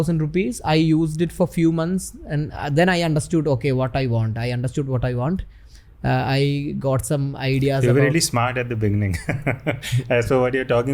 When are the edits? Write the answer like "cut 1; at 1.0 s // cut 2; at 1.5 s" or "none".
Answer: none